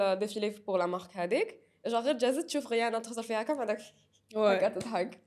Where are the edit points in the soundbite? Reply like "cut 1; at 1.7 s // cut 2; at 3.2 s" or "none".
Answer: none